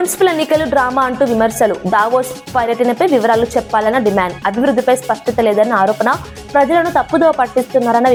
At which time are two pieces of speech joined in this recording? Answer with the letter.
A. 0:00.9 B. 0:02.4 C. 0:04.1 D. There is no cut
D